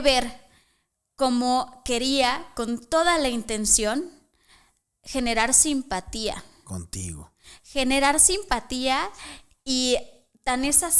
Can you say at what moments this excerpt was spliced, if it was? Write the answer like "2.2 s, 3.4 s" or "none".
none